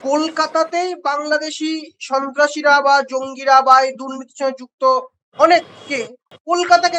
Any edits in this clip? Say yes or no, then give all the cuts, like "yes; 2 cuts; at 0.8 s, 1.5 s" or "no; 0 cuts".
no; 0 cuts